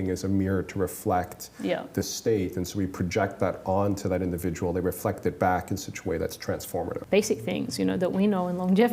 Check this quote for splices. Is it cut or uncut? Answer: cut